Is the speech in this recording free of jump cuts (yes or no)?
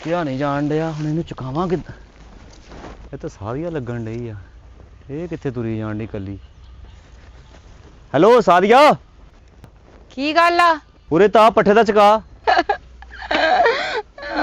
no